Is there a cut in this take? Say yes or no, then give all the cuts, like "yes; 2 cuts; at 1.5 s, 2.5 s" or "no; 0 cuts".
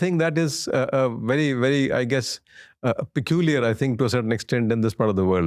no; 0 cuts